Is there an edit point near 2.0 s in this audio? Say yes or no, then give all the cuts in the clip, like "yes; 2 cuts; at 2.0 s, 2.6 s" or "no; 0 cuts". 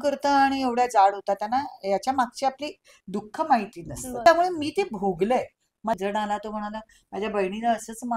no; 2 cuts; at 4.3 s, 6.0 s